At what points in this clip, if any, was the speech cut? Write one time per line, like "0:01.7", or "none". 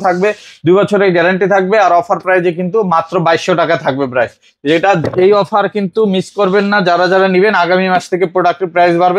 none